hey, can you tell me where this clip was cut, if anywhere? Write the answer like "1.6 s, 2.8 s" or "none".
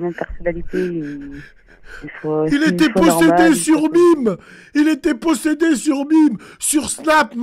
none